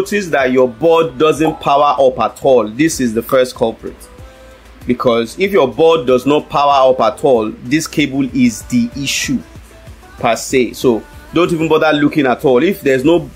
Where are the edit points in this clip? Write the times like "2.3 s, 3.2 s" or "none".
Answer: none